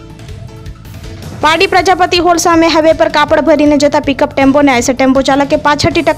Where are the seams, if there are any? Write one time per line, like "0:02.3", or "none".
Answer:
0:01.0